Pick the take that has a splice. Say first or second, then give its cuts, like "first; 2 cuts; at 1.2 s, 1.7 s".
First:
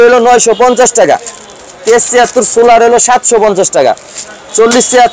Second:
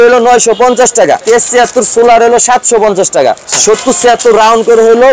second; 2 cuts; at 1.2 s, 3.5 s